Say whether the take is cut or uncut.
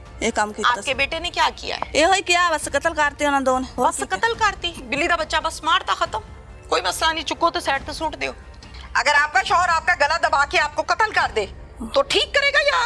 cut